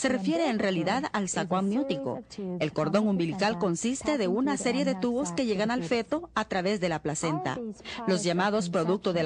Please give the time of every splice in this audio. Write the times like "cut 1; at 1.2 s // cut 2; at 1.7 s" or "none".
cut 1; at 3.2 s